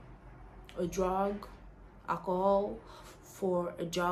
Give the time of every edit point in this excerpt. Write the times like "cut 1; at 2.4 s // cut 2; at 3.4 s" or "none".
none